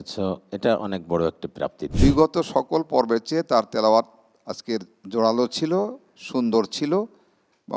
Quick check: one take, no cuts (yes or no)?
no